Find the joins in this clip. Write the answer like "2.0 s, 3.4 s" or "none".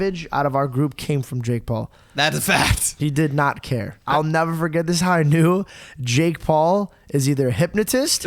3.9 s

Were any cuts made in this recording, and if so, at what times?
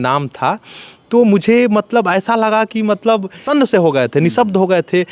none

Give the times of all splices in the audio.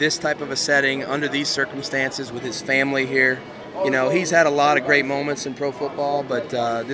3.6 s

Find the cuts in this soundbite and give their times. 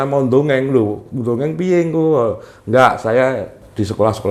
none

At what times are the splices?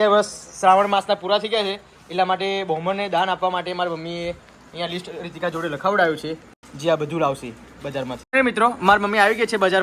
8.2 s

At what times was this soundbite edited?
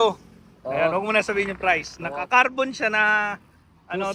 none

